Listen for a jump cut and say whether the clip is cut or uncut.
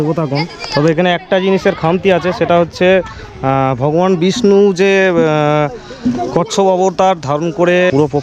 uncut